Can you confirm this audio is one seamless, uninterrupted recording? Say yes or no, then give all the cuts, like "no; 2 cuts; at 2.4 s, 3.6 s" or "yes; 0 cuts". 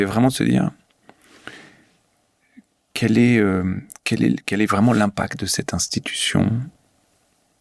yes; 0 cuts